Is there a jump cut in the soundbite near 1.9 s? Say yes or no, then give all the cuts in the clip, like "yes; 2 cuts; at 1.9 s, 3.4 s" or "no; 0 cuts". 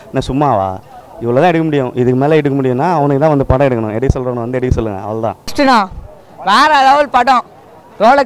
no; 1 cut; at 5.4 s